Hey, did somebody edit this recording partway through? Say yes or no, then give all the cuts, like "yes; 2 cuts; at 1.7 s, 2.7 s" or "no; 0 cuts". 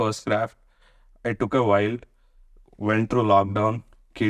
no; 0 cuts